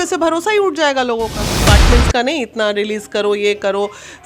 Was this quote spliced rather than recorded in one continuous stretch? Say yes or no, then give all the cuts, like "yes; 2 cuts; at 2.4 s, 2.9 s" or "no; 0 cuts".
yes; 1 cut; at 1.6 s